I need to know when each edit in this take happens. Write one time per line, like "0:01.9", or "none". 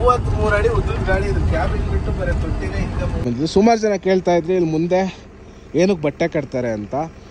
0:03.2